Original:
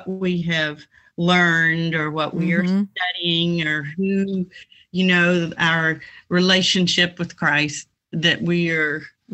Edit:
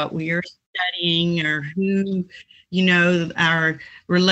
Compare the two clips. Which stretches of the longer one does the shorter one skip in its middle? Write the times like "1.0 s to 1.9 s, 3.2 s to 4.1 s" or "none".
none